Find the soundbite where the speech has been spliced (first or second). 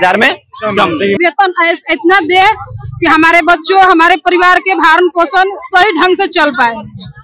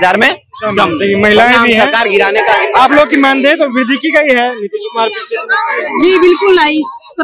first